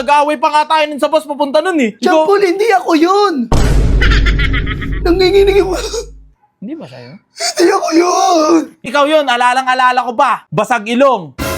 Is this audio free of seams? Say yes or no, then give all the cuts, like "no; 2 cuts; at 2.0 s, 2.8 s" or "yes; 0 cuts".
no; 3 cuts; at 1.9 s, 8.8 s, 10.4 s